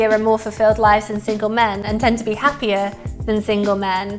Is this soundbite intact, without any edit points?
yes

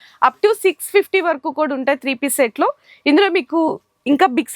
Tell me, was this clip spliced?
no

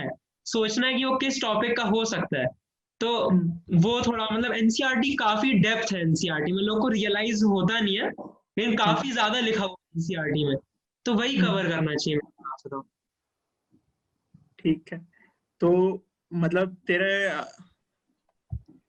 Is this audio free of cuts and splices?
yes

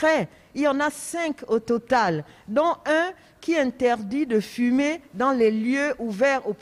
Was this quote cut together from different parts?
no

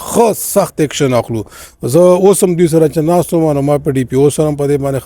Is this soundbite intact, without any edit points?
yes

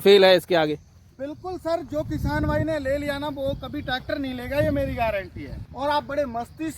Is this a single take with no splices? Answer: no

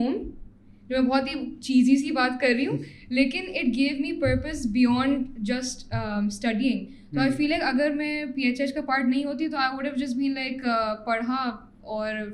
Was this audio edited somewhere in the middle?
no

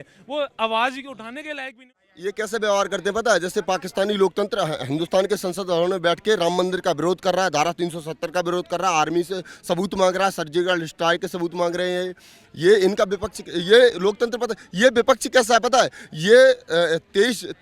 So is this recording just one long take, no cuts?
no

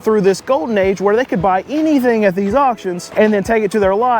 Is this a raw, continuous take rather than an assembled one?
no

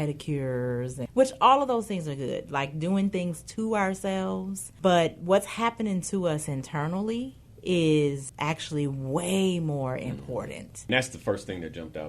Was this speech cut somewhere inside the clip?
yes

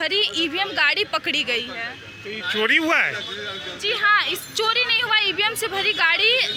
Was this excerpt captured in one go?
yes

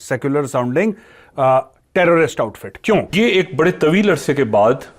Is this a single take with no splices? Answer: no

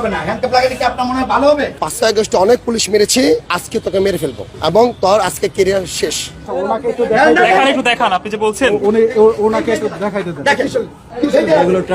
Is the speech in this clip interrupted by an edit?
yes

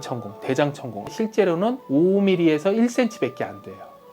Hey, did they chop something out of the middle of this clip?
yes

